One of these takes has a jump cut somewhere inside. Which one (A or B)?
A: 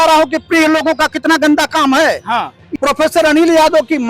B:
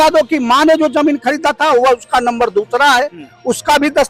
A